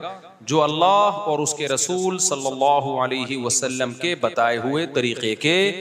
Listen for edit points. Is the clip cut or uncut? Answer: uncut